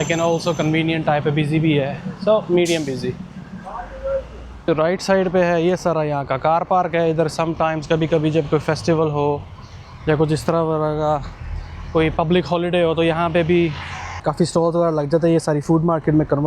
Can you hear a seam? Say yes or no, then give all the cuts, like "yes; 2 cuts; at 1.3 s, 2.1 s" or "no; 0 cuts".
yes; 2 cuts; at 4.7 s, 14.1 s